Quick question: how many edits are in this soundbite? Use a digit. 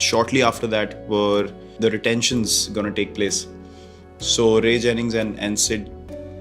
1